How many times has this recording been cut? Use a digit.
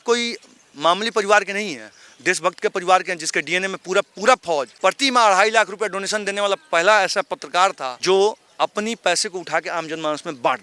2